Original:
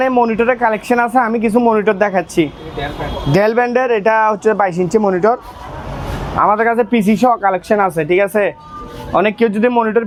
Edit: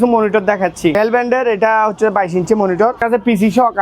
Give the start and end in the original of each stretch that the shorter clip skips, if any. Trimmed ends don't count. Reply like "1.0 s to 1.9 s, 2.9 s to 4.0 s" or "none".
2.5 s to 3.4 s, 5.4 s to 6.7 s